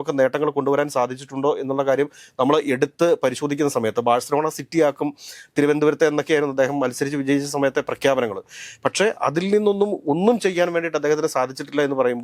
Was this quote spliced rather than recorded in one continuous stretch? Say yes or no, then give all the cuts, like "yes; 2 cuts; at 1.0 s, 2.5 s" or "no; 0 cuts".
no; 0 cuts